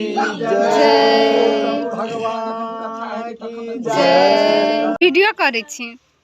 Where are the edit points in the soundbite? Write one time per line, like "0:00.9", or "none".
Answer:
0:04.9